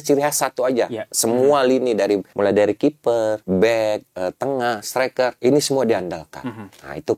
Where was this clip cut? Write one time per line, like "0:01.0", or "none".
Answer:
0:01.1
0:02.3
0:03.4
0:05.4